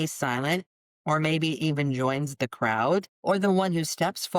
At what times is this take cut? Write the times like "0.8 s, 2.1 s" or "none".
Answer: 3.1 s